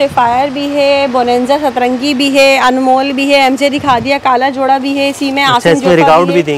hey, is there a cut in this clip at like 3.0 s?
no; 0 cuts

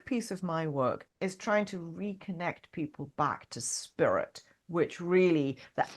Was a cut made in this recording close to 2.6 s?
no; 1 cut; at 1.1 s

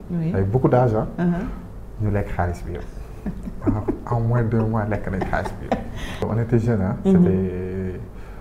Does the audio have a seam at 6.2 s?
yes; 1 cut; at 6.2 s

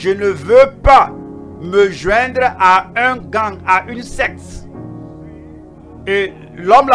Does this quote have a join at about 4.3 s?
yes; 2 cuts; at 4.3 s, 6.0 s

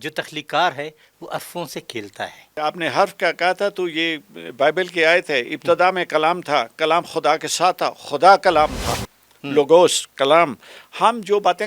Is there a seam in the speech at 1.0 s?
no; 1 cut; at 2.6 s

